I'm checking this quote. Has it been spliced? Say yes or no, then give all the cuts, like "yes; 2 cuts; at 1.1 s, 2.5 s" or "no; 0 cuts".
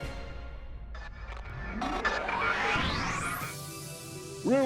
no; 0 cuts